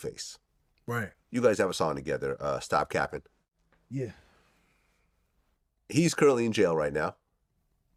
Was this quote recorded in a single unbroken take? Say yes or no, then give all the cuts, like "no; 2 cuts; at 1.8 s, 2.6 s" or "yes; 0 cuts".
yes; 0 cuts